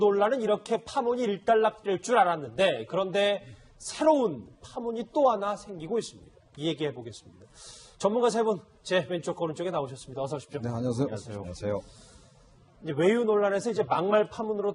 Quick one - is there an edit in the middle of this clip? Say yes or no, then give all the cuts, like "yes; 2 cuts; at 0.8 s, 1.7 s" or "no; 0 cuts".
yes; 1 cut; at 5.6 s